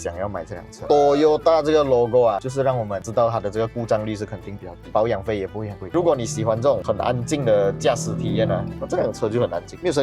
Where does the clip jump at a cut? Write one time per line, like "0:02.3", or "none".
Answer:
0:00.8
0:05.9